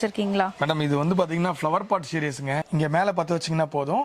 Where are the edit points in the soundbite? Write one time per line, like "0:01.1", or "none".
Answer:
0:02.6